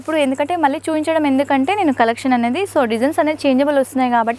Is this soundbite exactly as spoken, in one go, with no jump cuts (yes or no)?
yes